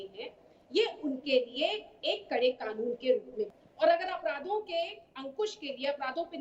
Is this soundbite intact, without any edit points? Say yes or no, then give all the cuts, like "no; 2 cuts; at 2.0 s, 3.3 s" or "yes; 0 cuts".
no; 1 cut; at 3.5 s